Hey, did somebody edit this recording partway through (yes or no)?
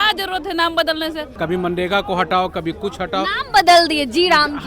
yes